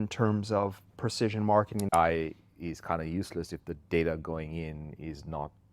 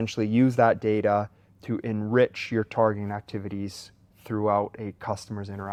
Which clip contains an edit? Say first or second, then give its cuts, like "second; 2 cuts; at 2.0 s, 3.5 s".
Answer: first; 1 cut; at 1.9 s